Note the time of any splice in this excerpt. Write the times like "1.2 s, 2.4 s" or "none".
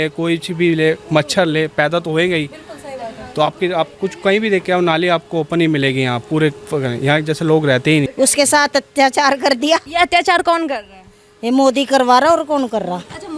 8.1 s, 9.9 s

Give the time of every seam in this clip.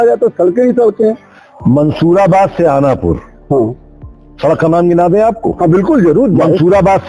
none

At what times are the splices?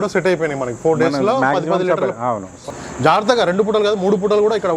2.6 s

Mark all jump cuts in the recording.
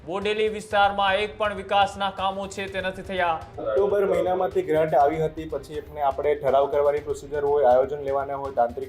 3.7 s

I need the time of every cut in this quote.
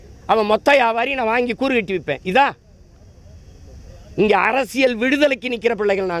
none

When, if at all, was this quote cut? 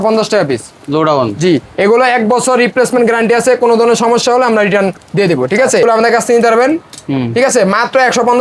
5.8 s

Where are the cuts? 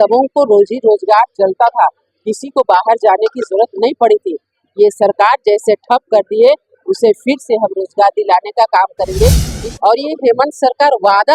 9.5 s

